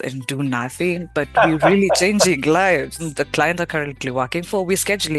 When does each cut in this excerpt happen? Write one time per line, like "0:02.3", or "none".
0:03.0